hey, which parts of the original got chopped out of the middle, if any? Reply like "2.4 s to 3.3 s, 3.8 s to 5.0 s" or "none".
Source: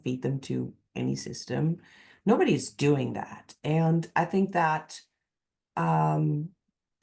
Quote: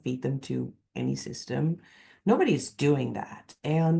none